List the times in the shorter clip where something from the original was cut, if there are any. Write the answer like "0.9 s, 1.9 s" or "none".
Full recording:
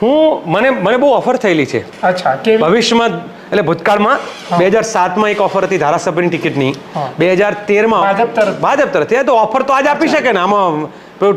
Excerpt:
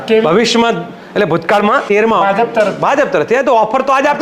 1.8 s